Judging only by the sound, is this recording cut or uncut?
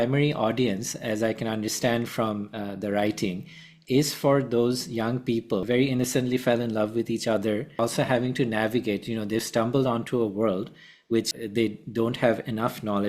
cut